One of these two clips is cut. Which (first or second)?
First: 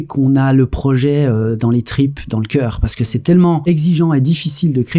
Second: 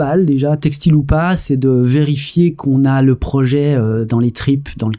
first